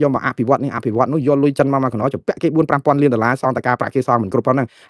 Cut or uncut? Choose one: uncut